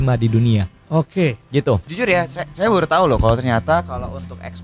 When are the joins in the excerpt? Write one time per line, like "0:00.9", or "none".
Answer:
0:01.9

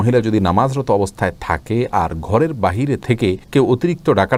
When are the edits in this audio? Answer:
none

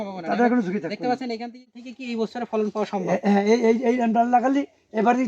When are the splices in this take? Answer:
0:01.8

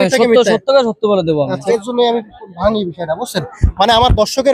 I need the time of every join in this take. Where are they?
0:01.6

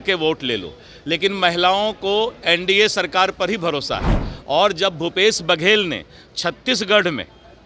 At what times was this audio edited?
none

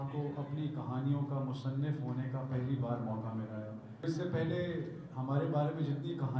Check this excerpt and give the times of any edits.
0:04.0

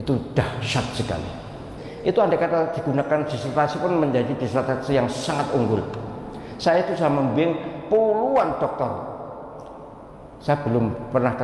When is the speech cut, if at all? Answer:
0:01.8

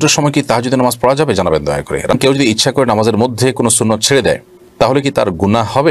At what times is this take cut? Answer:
0:02.1

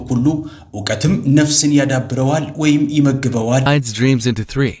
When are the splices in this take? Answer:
0:03.6

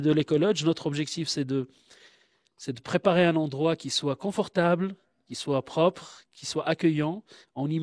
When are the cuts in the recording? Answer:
none

